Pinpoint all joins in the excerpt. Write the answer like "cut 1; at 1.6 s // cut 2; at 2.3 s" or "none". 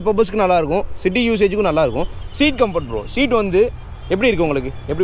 cut 1; at 2.2 s